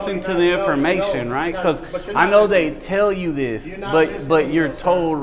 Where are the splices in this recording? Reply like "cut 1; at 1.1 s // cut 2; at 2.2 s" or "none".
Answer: none